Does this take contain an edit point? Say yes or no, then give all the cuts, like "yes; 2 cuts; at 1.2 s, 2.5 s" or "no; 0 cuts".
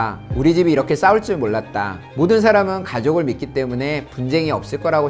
no; 0 cuts